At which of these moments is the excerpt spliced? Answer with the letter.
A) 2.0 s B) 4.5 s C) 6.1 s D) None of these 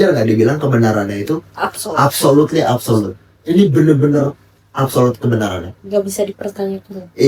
D